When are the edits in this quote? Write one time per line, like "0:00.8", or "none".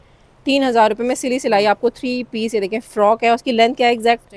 none